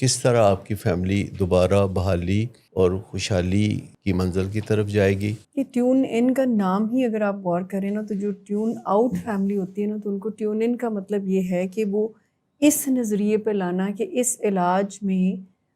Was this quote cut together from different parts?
yes; 3 cuts; at 2.6 s, 3.9 s, 5.5 s

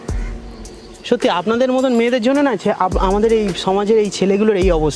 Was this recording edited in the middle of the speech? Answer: no; 0 cuts

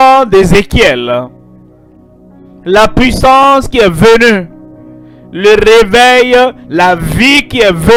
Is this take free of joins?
yes; 0 cuts

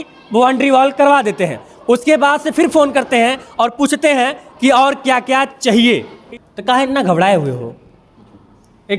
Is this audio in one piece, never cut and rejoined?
no; 1 cut; at 6.1 s

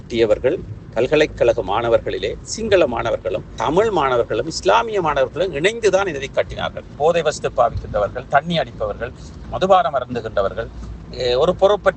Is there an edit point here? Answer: yes; 1 cut; at 6.9 s

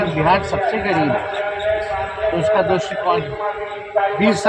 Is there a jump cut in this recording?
no; 0 cuts

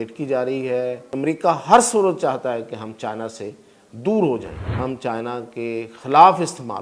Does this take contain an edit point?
yes; 2 cuts; at 1.0 s, 4.6 s

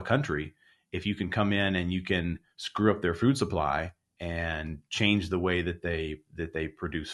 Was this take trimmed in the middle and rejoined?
no; 0 cuts

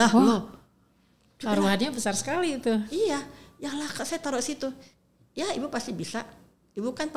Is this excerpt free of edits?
yes; 0 cuts

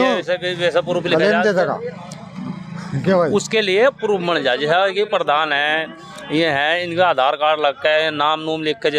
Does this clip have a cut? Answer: no; 0 cuts

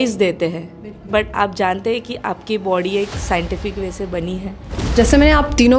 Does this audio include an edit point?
yes; 1 cut; at 4.8 s

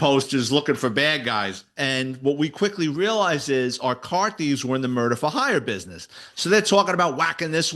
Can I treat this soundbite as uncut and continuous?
no; 1 cut; at 1.7 s

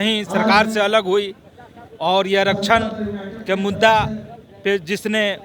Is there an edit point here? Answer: no; 0 cuts

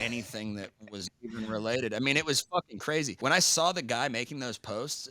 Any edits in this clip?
yes; 1 cut; at 3.1 s

